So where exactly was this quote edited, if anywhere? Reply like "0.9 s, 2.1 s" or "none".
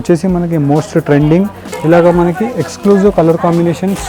1.6 s

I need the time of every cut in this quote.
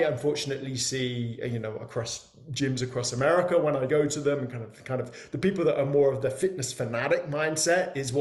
none

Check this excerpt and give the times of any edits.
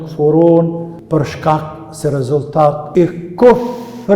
0.9 s, 2.8 s

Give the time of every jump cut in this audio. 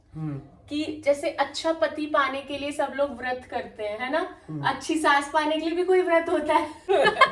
none

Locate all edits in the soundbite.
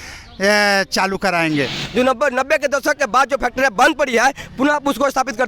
1.8 s

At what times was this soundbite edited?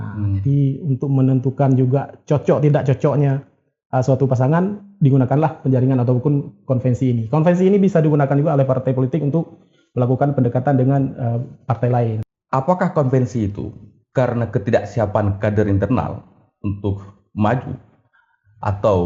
12.2 s

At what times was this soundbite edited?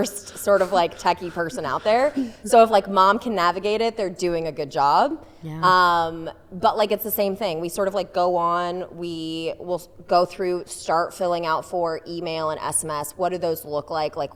none

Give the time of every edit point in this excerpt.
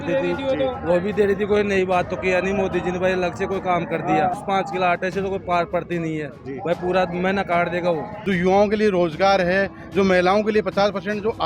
4.4 s, 8.1 s

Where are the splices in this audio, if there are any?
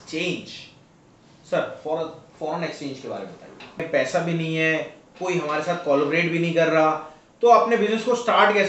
3.8 s

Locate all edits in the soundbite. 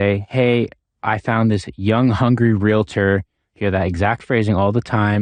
none

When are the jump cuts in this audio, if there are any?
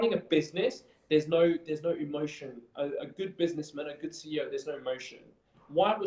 none

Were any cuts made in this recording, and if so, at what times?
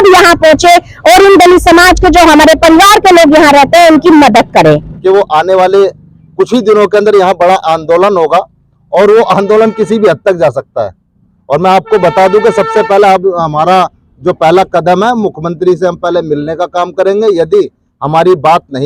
4.9 s

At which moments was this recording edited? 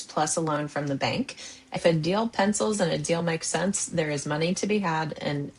1.8 s

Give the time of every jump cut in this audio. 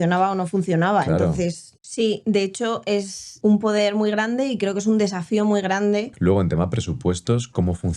1.7 s, 6.1 s

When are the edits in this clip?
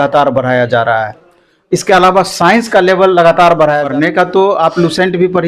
3.8 s

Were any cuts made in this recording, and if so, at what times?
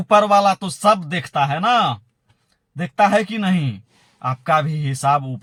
none

